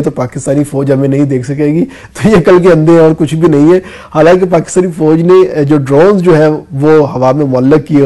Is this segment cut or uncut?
uncut